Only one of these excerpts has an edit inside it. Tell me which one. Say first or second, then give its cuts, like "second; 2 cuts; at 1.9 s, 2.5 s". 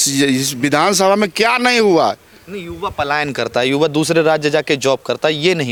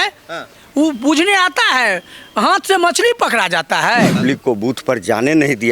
second; 1 cut; at 4.2 s